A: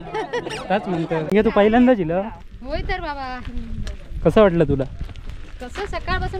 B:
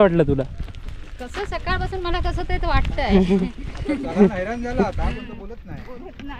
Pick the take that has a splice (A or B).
A